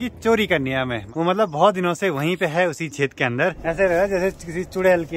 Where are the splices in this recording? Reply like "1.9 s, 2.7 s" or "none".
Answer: 1.0 s, 3.5 s